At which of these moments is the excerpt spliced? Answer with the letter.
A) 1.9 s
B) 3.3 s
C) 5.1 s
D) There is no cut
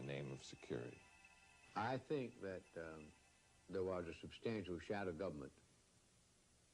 A